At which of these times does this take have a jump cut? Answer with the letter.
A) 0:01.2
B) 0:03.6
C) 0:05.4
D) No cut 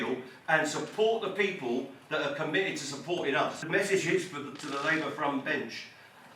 B